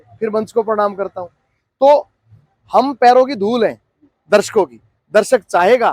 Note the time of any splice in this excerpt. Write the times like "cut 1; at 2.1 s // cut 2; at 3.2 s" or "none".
none